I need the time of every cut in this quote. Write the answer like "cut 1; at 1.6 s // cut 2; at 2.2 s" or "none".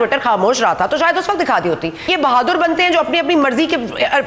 cut 1; at 2.0 s

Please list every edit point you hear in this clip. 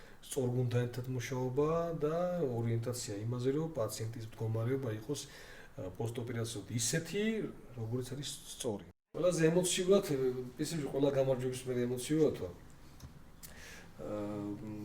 cut 1; at 8.9 s

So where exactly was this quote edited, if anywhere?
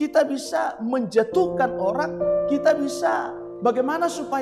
cut 1; at 3.4 s

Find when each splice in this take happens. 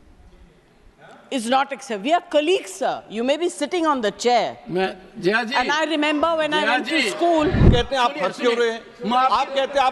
cut 1; at 7.7 s

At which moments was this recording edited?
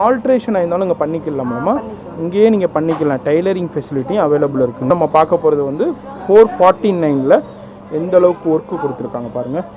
cut 1; at 4.9 s

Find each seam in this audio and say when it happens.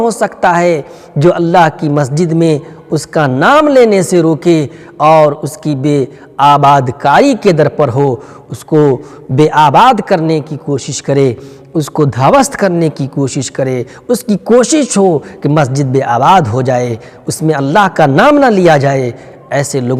none

